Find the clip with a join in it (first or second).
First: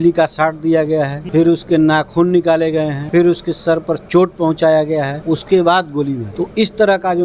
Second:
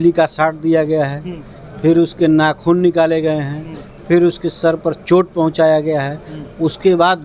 first